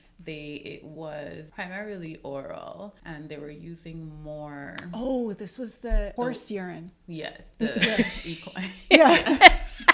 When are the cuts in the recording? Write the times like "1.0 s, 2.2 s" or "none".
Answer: 1.5 s, 3.0 s, 6.1 s